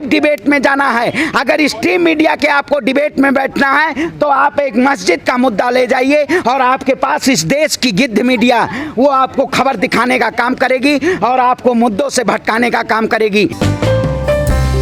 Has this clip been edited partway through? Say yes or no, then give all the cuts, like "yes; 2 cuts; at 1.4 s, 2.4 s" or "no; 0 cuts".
no; 0 cuts